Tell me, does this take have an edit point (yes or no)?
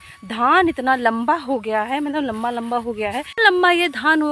yes